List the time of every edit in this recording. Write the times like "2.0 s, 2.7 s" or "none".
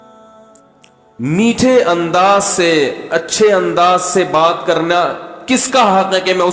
1.1 s